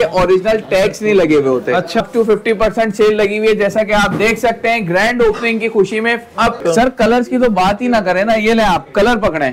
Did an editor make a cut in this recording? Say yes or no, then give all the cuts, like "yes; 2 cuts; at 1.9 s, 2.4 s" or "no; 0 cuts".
yes; 2 cuts; at 2.0 s, 6.6 s